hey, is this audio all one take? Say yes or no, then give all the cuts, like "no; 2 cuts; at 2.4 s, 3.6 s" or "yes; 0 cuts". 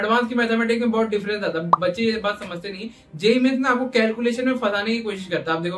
yes; 0 cuts